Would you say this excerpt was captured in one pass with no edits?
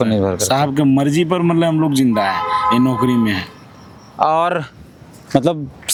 yes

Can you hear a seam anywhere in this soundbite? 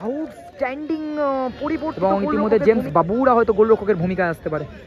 yes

